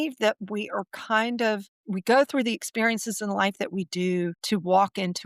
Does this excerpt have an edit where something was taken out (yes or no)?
yes